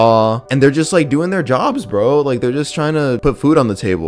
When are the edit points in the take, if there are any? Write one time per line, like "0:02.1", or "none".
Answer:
none